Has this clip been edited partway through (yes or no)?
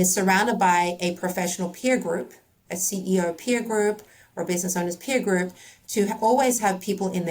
no